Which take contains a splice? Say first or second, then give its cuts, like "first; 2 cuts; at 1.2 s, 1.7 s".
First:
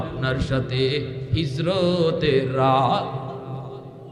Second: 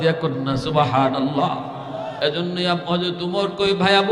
second; 1 cut; at 2.1 s